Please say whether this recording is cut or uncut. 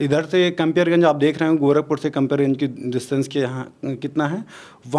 uncut